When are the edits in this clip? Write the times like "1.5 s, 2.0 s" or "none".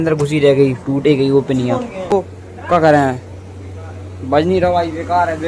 2.1 s